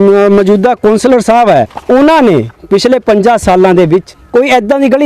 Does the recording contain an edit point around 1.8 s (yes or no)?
yes